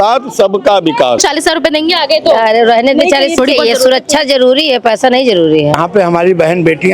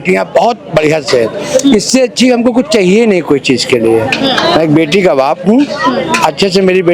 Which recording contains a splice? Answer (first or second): first